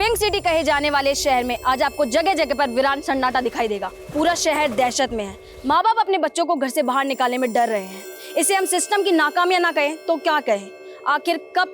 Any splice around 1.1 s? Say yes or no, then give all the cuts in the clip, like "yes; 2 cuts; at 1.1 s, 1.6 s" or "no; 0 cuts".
no; 1 cut; at 4.0 s